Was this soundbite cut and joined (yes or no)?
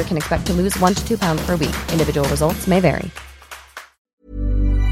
yes